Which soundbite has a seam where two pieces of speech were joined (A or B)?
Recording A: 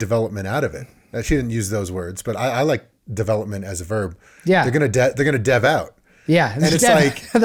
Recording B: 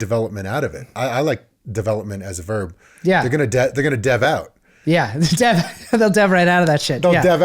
B